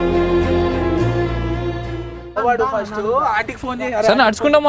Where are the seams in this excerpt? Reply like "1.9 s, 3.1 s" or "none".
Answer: none